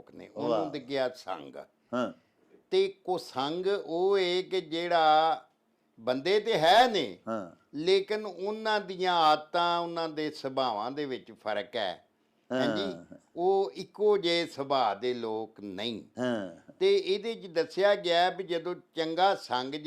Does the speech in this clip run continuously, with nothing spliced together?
yes; 0 cuts

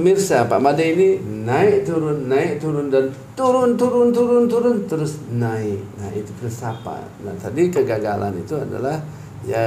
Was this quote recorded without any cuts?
yes; 0 cuts

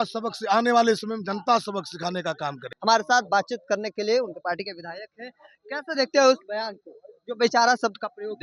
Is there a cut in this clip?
no; 0 cuts

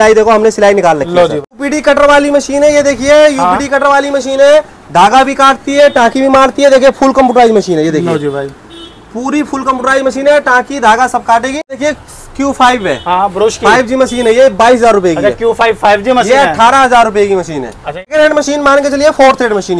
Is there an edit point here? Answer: yes; 3 cuts; at 1.5 s, 11.8 s, 18.1 s

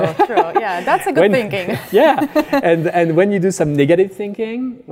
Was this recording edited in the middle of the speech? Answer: no; 0 cuts

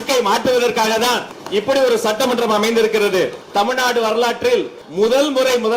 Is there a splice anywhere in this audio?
yes; 3 cuts; at 1.3 s, 3.4 s, 4.8 s

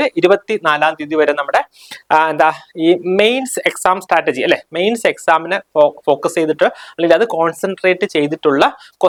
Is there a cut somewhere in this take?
no; 0 cuts

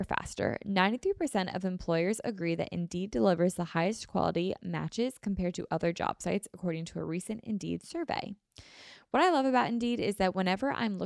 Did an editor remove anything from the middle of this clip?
no; 0 cuts

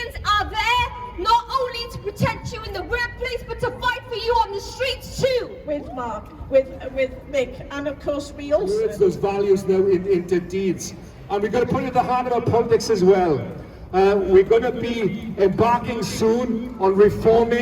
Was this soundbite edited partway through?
yes; 2 cuts; at 5.6 s, 8.8 s

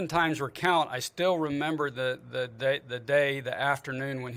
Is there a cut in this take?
no; 0 cuts

